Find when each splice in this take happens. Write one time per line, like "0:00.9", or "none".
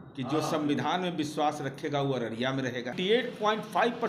0:02.9

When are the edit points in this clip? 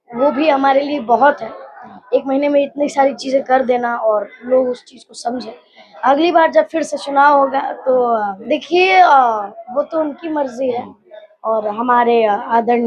0:08.3

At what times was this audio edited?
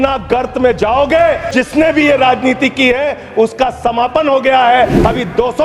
0:01.5

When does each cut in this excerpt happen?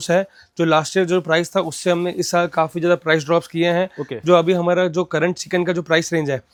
none

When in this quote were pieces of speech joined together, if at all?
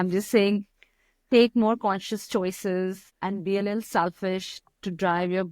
0:03.1

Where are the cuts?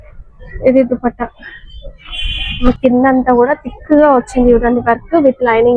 0:02.5

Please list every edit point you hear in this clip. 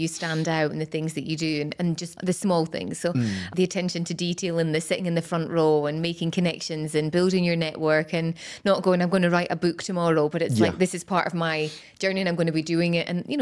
0:02.1
0:03.5

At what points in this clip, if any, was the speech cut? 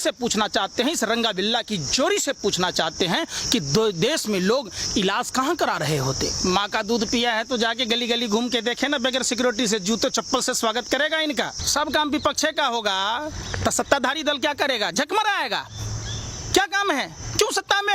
0:06.4
0:11.6

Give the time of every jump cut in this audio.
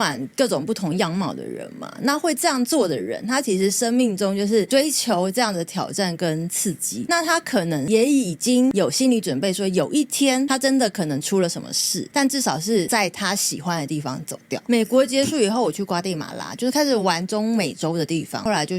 none

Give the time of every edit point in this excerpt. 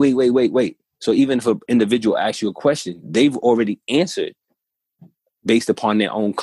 none

